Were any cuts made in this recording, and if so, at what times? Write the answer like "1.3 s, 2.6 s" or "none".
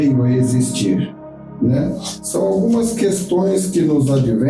none

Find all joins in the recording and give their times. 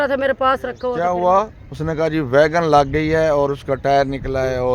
1.0 s

